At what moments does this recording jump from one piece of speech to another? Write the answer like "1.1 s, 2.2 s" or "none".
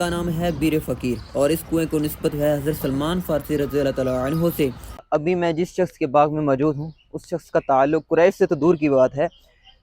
4.9 s